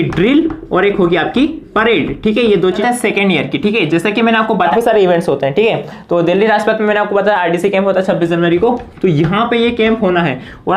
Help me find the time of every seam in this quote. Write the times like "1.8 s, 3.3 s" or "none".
2.7 s, 4.6 s